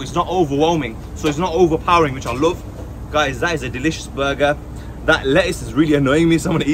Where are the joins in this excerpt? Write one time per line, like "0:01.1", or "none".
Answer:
none